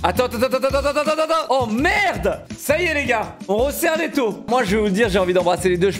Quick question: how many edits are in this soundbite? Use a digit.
2